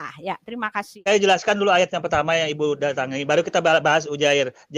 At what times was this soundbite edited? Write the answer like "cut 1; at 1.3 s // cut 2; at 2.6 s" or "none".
cut 1; at 0.9 s